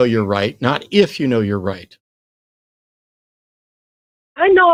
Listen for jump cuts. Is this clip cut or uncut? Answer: uncut